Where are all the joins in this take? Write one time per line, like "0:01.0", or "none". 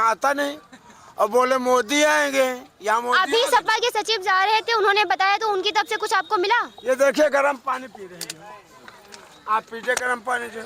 none